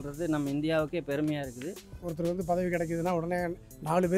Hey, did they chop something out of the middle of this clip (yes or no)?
yes